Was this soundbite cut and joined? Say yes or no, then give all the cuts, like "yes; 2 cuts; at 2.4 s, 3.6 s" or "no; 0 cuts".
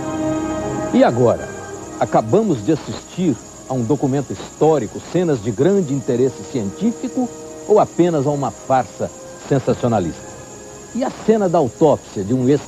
yes; 1 cut; at 8.5 s